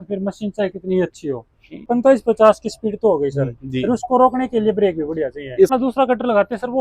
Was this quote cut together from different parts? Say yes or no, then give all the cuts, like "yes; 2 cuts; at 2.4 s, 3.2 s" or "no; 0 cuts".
yes; 2 cuts; at 1.8 s, 5.7 s